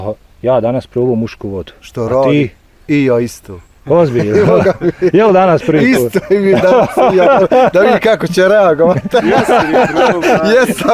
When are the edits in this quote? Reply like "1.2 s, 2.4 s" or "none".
none